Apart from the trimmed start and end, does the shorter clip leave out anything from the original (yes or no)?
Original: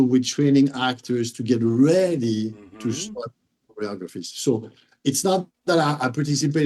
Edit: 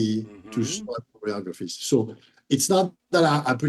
yes